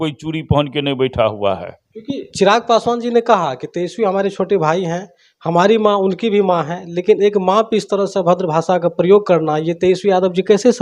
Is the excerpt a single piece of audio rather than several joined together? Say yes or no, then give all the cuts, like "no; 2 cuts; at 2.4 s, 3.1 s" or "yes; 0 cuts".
yes; 0 cuts